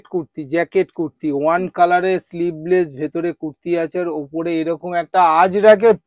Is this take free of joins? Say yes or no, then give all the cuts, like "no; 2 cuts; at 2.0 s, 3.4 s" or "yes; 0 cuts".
yes; 0 cuts